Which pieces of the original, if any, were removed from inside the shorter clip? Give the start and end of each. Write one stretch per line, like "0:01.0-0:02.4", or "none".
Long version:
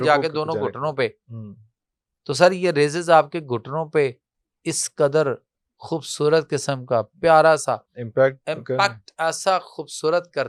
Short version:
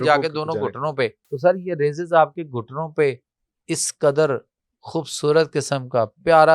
0:01.2-0:02.2